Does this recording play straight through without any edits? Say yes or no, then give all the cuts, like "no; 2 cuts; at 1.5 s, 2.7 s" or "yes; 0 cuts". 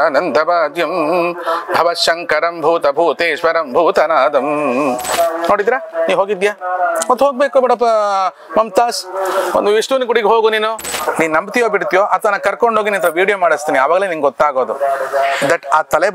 no; 2 cuts; at 5.1 s, 10.9 s